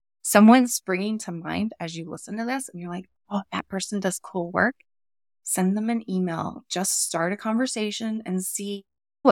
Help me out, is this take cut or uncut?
uncut